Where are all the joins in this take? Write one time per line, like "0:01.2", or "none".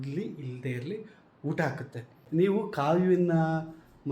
0:02.1